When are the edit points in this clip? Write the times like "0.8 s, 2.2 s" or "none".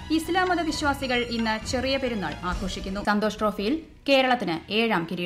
3.0 s

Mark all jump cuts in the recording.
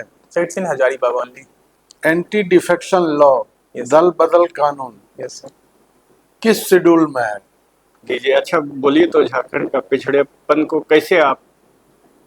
1.8 s, 7.9 s

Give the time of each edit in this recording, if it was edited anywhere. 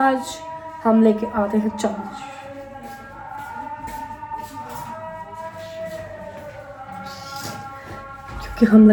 none

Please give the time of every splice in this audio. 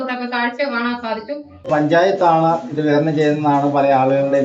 1.7 s

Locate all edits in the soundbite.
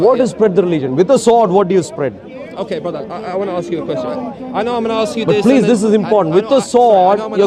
none

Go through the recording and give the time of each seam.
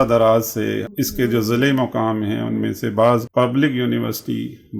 0.9 s, 3.3 s

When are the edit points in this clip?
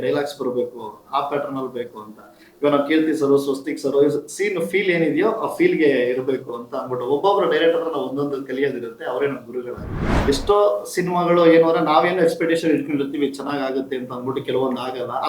9.8 s

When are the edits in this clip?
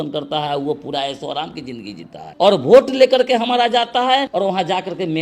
2.2 s, 4.3 s

